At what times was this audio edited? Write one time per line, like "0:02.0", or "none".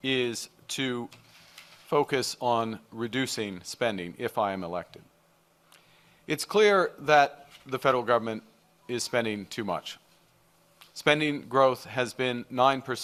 none